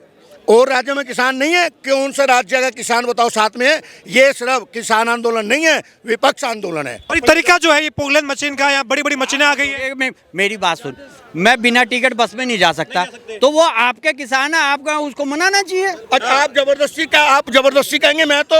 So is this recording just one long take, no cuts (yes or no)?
no